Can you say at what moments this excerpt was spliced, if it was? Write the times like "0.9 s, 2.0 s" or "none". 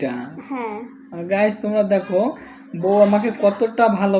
none

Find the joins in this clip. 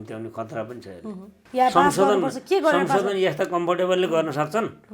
1.4 s

